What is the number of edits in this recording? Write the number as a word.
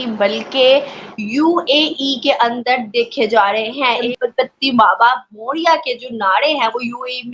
one